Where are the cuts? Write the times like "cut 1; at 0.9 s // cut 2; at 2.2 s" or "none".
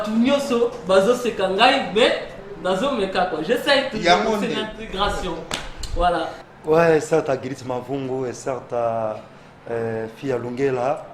cut 1; at 6.4 s